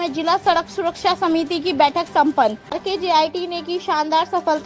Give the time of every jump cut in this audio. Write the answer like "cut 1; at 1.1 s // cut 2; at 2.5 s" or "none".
cut 1; at 2.7 s